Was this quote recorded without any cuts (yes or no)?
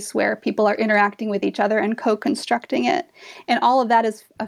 yes